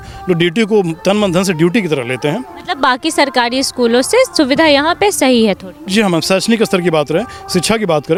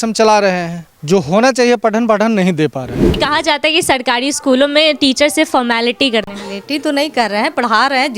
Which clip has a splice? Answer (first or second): second